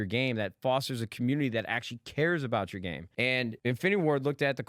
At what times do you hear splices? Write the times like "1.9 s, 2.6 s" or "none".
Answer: 3.5 s